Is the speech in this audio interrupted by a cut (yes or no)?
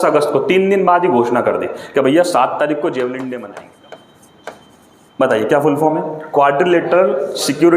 yes